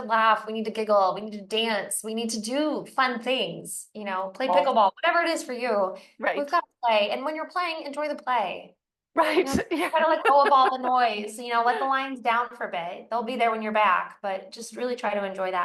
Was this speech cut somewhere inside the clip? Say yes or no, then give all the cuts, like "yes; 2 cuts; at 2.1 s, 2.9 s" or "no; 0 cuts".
no; 0 cuts